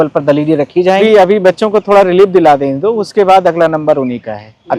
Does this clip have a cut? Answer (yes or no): yes